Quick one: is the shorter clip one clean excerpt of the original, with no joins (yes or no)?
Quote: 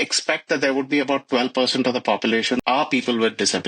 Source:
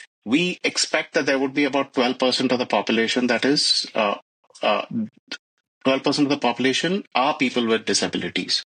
no